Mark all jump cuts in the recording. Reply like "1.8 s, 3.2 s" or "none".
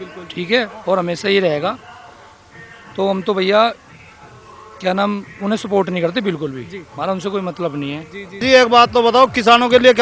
8.4 s